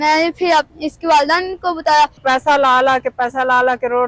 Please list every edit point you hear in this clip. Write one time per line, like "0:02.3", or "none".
0:02.2